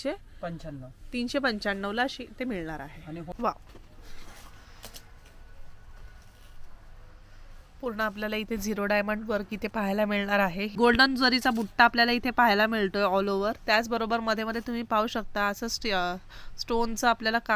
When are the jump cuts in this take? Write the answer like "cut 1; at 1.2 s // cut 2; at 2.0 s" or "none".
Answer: cut 1; at 3.3 s // cut 2; at 10.7 s